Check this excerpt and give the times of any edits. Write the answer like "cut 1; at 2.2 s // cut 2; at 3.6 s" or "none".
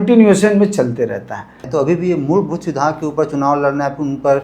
cut 1; at 1.6 s